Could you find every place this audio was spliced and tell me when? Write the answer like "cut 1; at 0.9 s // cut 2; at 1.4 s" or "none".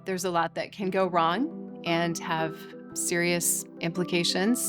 cut 1; at 3.6 s